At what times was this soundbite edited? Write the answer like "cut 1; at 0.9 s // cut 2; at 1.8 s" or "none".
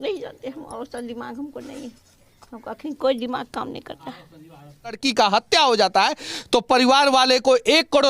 cut 1; at 5.0 s